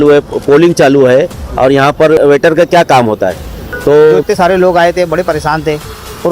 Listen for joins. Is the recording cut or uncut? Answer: cut